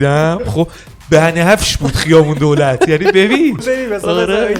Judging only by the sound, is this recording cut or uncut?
cut